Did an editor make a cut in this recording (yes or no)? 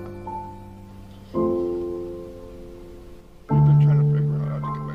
no